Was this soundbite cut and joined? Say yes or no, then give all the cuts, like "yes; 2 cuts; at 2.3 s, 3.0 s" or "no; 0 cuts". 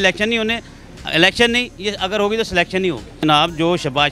yes; 1 cut; at 3.2 s